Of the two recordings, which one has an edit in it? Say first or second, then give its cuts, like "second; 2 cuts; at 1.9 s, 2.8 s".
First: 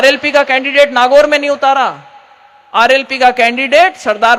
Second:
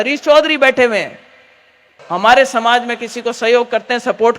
second; 1 cut; at 2.0 s